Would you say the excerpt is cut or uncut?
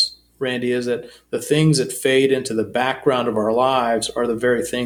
uncut